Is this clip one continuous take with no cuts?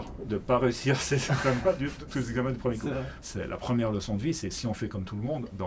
no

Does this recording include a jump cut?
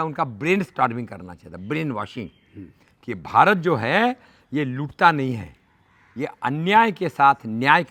no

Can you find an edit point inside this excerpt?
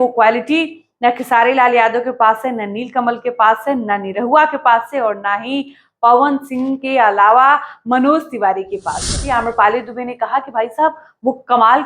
yes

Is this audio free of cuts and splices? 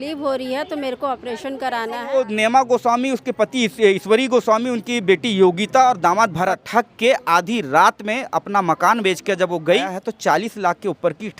no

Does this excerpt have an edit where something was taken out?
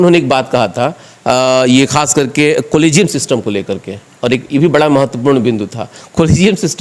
no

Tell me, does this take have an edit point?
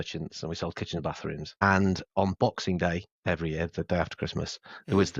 yes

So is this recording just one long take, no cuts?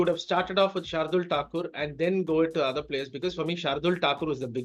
yes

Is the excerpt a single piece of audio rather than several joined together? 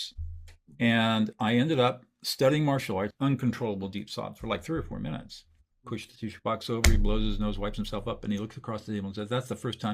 no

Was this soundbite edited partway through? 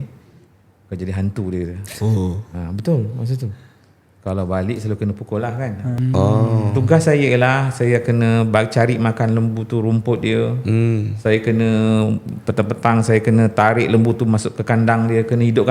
yes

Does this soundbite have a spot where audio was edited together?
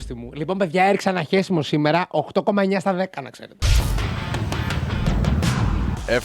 yes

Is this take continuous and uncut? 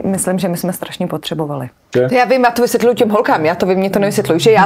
no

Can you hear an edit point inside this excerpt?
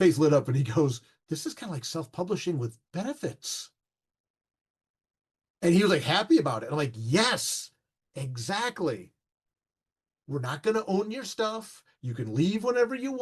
yes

